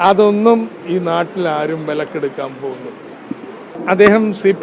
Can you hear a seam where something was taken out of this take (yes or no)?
yes